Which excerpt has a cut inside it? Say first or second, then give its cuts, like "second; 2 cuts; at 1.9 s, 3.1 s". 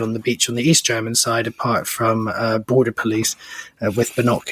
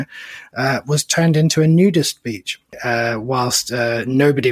second; 1 cut; at 2.8 s